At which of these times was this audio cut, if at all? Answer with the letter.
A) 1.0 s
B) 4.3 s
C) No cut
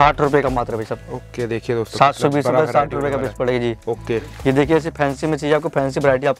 B